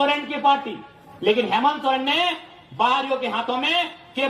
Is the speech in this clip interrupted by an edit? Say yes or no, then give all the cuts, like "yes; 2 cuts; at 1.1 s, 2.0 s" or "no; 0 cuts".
no; 0 cuts